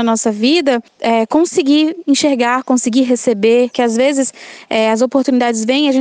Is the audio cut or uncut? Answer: cut